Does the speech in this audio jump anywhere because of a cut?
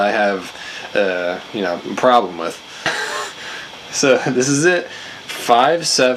no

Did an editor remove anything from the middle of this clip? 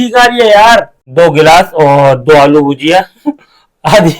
yes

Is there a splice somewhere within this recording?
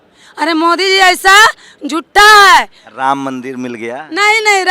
no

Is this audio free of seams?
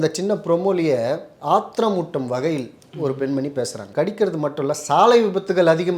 no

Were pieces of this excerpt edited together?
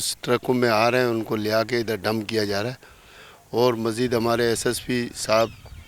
no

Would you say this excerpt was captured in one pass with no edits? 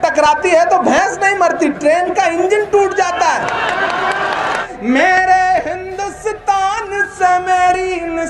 no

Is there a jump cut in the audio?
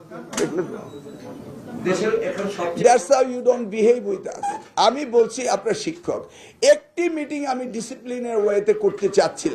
no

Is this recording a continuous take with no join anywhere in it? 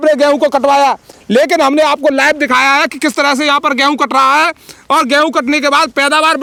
yes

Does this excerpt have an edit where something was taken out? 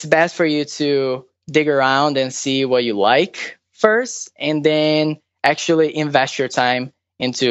no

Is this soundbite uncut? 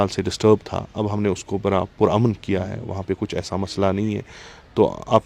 yes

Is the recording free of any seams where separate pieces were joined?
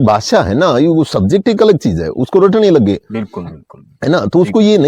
yes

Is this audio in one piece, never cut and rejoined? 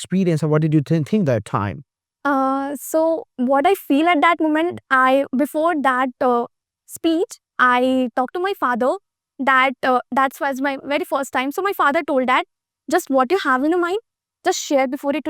yes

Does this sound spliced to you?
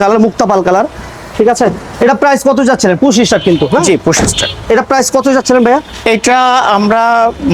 no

